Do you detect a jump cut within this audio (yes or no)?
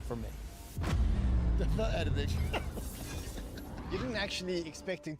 yes